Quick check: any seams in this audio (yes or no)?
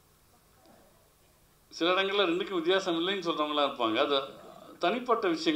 no